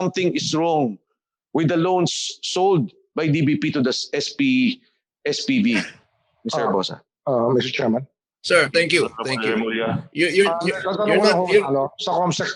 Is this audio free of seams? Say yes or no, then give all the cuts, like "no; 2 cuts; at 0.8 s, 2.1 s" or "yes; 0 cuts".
yes; 0 cuts